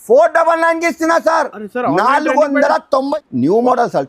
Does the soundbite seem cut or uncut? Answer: cut